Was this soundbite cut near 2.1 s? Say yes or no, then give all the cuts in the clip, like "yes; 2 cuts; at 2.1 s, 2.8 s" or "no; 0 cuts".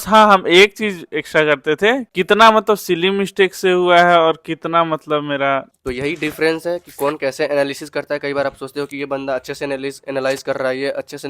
yes; 2 cuts; at 2.1 s, 5.7 s